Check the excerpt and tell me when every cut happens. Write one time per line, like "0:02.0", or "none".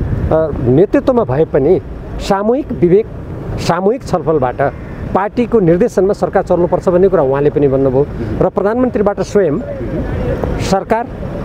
none